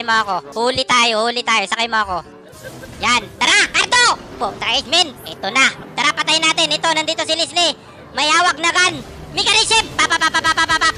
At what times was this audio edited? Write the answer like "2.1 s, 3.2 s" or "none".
6.0 s